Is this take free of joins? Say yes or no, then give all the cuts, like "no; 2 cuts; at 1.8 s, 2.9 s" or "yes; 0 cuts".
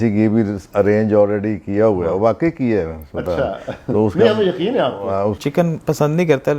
no; 1 cut; at 5.4 s